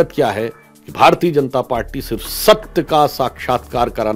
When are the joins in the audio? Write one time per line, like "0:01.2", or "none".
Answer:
none